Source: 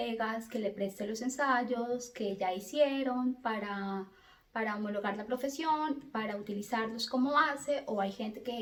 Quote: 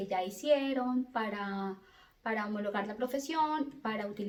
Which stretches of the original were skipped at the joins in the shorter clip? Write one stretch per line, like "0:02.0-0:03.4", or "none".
none